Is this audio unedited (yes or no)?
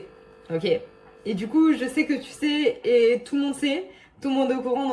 yes